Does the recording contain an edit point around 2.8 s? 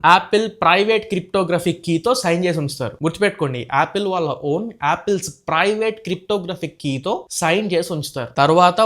no; 0 cuts

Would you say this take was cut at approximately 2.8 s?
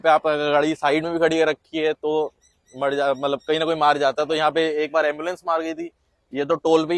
no; 0 cuts

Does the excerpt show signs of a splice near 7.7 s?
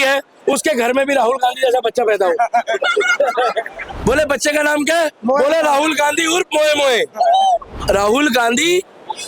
yes; 2 cuts; at 3.9 s, 7.7 s

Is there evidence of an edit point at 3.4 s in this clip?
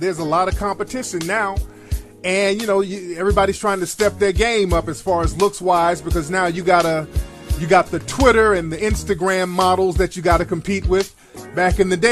yes; 1 cut; at 3.4 s

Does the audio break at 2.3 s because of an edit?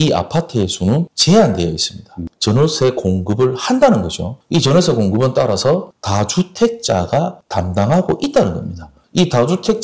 yes; 1 cut; at 2.3 s

